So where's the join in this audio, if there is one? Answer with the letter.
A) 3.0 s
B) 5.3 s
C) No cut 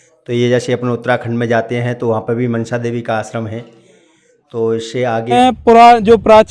B